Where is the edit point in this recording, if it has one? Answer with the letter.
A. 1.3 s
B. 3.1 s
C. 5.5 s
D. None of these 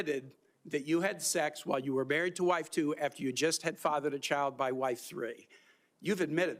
D